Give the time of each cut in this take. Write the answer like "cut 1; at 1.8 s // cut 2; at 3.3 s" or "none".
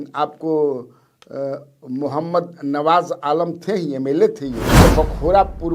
cut 1; at 4.7 s